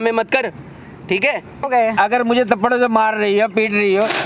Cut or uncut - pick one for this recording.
cut